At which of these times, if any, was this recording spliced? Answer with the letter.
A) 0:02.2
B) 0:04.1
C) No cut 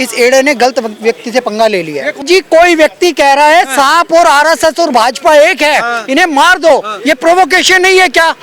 A